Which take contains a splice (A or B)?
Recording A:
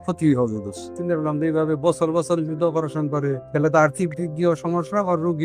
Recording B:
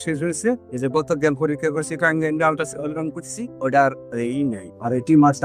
A